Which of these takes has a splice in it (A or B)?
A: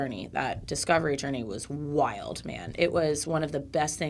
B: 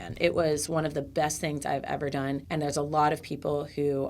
B